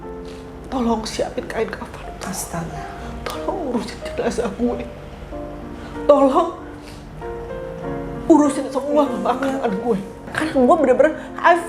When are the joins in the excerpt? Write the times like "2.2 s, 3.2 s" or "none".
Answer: 10.3 s